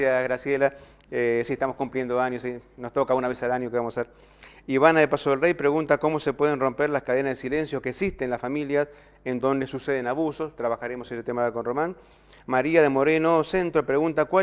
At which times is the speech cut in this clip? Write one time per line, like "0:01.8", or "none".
none

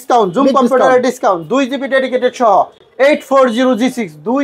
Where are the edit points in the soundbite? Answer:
none

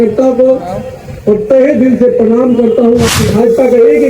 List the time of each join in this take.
0:03.1

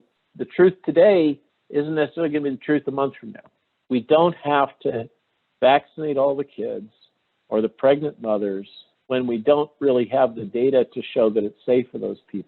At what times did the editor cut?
0:03.8
0:09.0

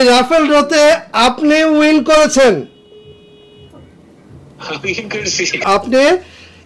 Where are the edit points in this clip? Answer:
0:05.6

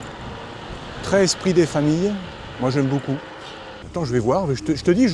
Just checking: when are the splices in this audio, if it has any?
0:03.7

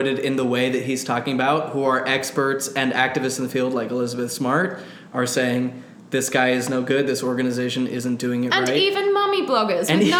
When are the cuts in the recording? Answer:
none

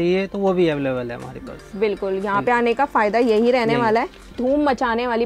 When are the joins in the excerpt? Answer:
0:04.2

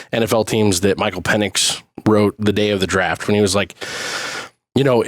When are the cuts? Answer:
0:03.2

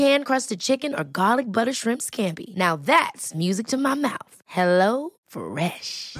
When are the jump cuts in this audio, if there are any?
none

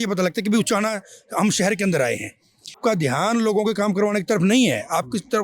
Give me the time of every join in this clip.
0:02.8

